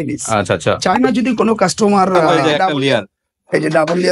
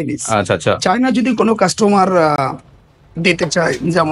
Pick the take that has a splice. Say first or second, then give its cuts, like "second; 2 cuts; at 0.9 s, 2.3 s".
first; 1 cut; at 2.3 s